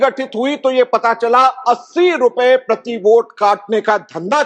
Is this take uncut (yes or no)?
yes